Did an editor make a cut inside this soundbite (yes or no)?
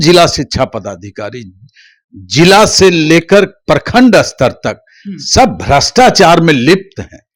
no